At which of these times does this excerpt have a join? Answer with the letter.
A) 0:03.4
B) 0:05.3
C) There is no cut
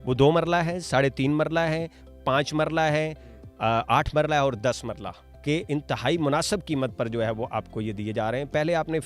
B